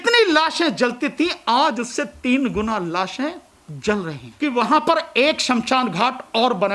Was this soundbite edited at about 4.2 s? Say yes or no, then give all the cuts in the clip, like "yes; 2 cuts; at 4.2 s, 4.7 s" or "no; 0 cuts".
yes; 1 cut; at 4.2 s